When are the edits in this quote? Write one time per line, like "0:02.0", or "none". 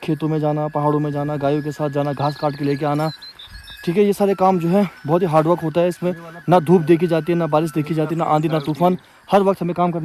none